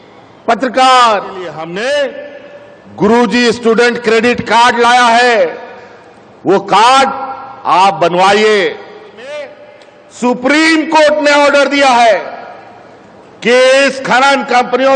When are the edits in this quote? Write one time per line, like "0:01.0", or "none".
0:01.6
0:09.4